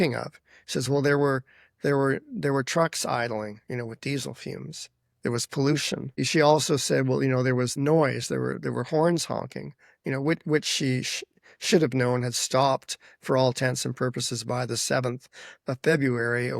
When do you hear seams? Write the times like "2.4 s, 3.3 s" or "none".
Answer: 6.2 s, 7.7 s